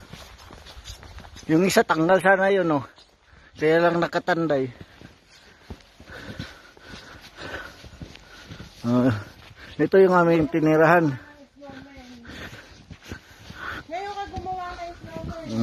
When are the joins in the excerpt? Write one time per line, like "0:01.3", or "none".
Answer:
0:14.7